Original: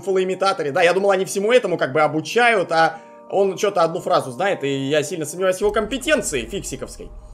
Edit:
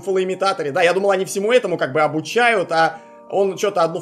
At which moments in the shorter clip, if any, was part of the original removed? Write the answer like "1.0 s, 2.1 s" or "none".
none